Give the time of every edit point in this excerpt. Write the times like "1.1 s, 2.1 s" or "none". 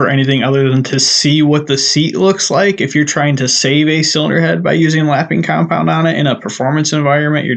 none